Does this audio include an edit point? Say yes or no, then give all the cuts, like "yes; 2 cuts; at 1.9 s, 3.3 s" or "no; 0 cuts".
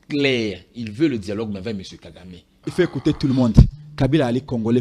yes; 1 cut; at 2.5 s